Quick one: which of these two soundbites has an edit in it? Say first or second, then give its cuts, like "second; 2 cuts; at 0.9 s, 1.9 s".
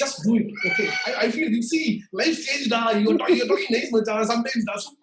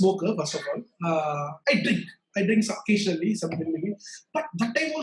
first; 1 cut; at 1.0 s